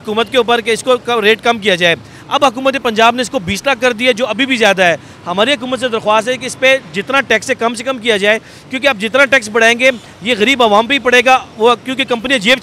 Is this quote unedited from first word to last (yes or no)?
yes